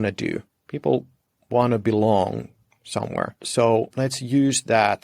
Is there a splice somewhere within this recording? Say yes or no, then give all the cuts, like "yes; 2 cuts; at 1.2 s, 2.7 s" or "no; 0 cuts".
yes; 2 cuts; at 3.4 s, 3.9 s